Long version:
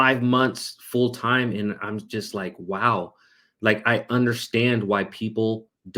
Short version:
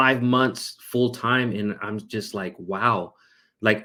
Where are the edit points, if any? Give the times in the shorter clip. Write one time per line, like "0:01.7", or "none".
none